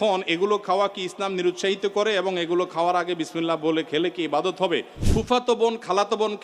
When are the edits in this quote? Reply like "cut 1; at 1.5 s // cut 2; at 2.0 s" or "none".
cut 1; at 5.0 s